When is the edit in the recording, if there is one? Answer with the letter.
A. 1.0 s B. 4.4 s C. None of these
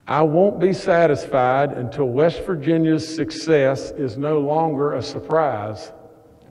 C